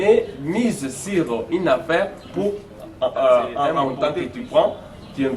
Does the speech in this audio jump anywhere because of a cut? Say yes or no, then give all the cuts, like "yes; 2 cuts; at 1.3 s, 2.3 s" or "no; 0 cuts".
yes; 1 cut; at 3.8 s